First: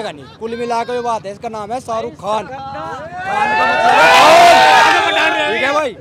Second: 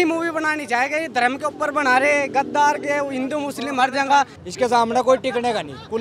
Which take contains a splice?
second; 1 cut; at 4.4 s

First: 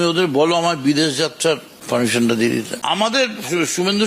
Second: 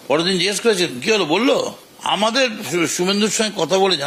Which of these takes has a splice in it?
first; 2 cuts; at 1.7 s, 2.7 s

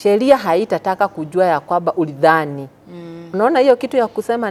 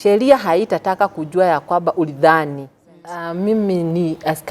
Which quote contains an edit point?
second; 1 cut; at 3.2 s

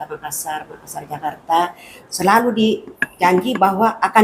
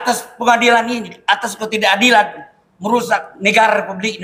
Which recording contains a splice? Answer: first; 1 cut; at 2.1 s

